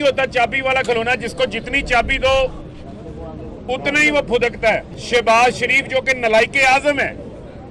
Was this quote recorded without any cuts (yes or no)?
no